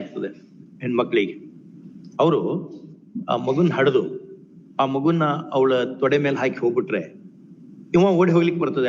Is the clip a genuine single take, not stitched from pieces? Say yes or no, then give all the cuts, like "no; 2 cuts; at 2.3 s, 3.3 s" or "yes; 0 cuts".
yes; 0 cuts